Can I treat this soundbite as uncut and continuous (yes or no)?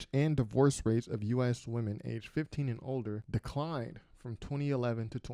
no